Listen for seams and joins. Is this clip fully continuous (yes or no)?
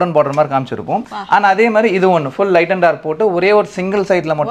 yes